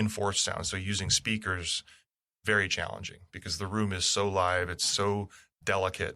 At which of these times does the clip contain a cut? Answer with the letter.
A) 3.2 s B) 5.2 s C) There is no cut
C